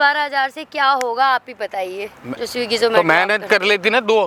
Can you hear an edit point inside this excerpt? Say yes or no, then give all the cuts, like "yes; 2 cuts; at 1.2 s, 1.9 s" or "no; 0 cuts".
no; 0 cuts